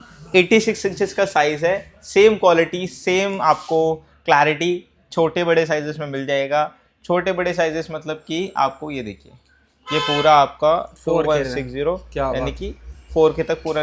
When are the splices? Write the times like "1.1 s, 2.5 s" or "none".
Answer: none